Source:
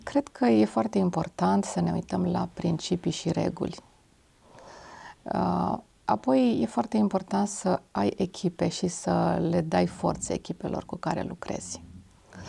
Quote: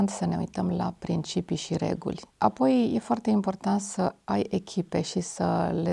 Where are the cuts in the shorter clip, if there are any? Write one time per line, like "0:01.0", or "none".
0:02.3